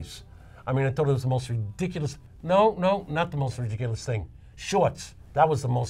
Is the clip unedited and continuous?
yes; 0 cuts

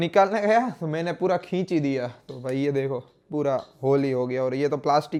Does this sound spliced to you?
no; 0 cuts

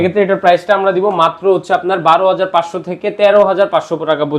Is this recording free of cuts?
yes; 0 cuts

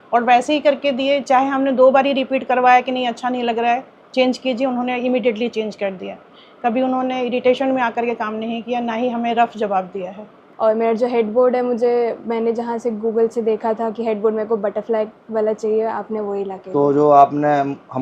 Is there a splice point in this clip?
yes; 1 cut; at 10.4 s

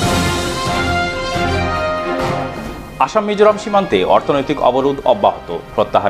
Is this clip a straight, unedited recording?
no; 1 cut; at 2.5 s

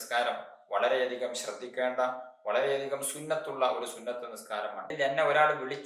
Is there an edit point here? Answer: yes; 1 cut; at 4.9 s

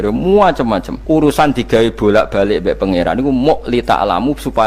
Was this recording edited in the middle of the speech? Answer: yes; 1 cut; at 0.9 s

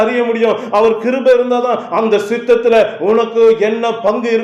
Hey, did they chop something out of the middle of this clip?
no; 0 cuts

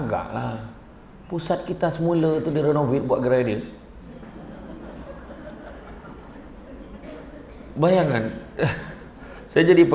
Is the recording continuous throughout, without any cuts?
yes; 0 cuts

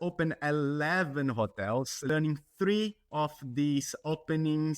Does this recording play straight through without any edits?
no; 1 cut; at 2.0 s

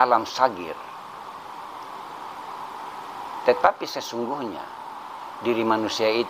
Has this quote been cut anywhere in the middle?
no; 0 cuts

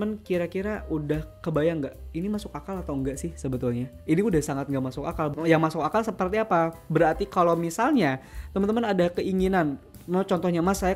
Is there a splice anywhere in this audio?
yes; 2 cuts; at 1.3 s, 5.3 s

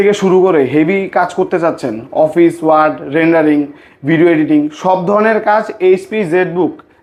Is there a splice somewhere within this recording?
no; 0 cuts

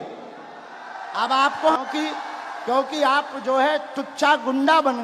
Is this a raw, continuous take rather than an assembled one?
no; 1 cut; at 1.8 s

